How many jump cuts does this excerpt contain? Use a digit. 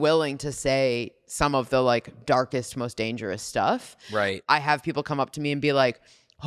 1